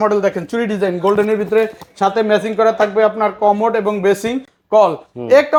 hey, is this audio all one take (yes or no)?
yes